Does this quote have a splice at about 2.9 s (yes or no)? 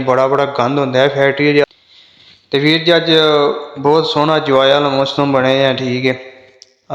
no